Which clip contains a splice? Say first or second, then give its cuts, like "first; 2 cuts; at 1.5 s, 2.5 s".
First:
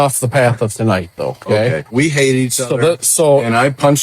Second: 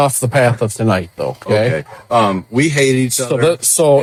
first; 1 cut; at 1.9 s